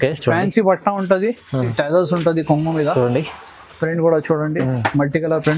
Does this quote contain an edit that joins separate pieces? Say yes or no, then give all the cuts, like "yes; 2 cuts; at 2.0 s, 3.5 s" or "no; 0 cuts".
yes; 1 cut; at 1.6 s